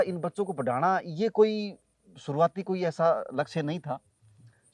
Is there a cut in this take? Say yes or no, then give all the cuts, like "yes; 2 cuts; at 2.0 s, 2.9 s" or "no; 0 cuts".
no; 0 cuts